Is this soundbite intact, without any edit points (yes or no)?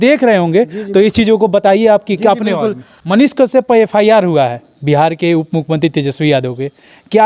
no